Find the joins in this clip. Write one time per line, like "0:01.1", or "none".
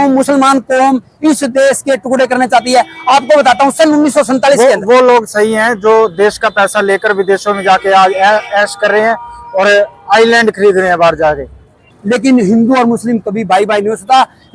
0:11.9